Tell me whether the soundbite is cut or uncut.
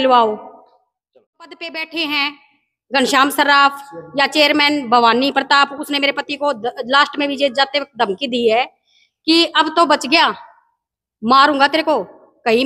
cut